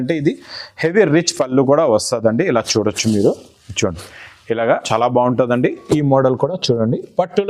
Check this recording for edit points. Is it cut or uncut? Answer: cut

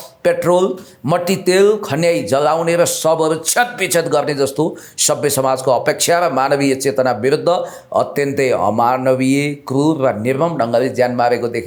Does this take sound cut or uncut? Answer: uncut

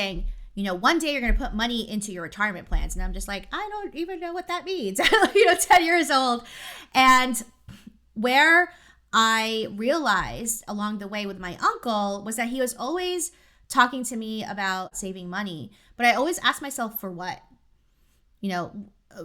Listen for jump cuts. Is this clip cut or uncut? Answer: cut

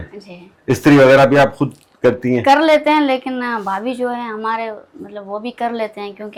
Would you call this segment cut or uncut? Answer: uncut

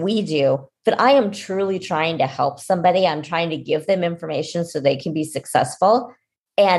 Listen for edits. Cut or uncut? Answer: uncut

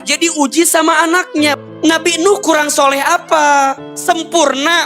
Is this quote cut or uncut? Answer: cut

